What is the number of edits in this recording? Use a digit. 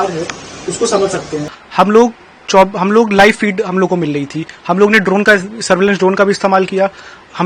1